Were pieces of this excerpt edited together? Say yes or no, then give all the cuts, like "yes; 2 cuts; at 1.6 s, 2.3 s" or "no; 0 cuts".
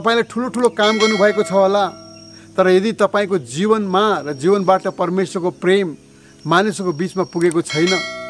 no; 0 cuts